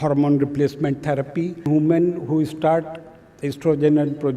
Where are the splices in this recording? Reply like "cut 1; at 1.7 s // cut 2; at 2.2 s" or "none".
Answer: cut 1; at 1.7 s